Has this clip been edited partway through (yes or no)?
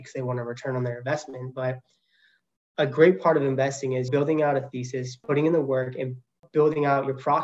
yes